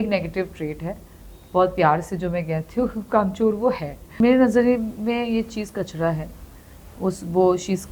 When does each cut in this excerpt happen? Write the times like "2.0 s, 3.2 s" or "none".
4.2 s